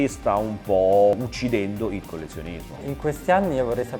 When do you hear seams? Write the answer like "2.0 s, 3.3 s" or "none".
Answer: 1.1 s, 2.8 s